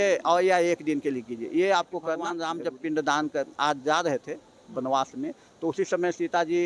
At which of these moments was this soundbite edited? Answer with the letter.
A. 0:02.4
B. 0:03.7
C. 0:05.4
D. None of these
A